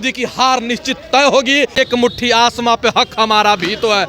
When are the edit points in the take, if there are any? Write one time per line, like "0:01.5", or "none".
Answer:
0:01.7